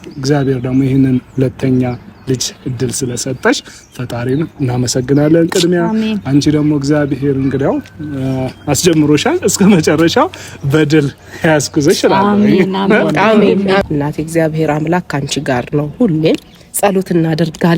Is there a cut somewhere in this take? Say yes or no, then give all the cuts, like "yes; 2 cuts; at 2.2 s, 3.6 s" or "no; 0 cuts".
yes; 1 cut; at 13.8 s